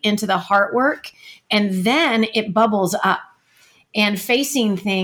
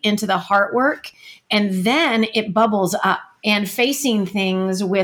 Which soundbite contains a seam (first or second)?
second